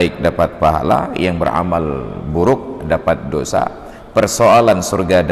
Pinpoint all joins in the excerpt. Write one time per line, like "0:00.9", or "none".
none